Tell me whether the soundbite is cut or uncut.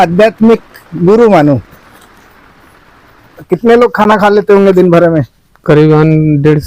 cut